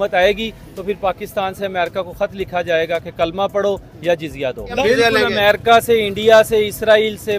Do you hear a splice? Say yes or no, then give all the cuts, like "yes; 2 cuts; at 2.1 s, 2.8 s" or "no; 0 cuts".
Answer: yes; 1 cut; at 4.8 s